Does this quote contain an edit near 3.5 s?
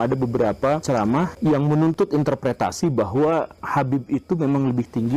no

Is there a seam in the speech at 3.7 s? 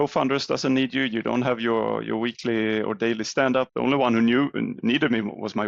yes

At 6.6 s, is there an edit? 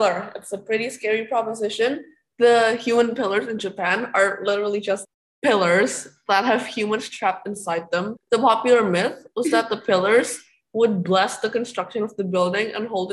no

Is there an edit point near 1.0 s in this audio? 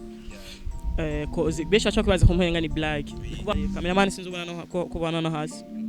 no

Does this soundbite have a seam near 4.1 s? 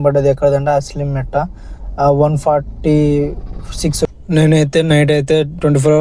yes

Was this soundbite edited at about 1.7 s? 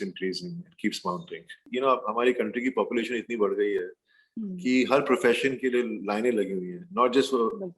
yes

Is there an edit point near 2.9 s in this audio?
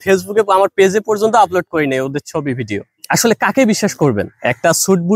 yes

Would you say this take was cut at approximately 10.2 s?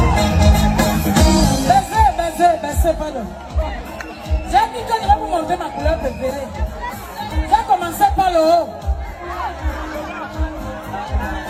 no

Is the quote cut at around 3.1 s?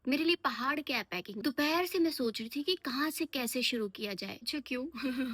no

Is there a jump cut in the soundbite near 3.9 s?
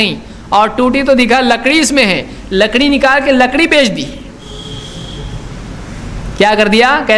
no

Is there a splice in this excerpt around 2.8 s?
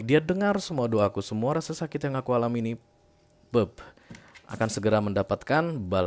no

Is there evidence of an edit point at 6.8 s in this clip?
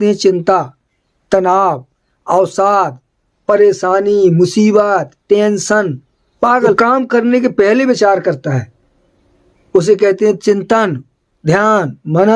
yes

